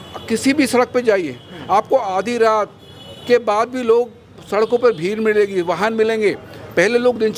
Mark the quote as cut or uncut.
uncut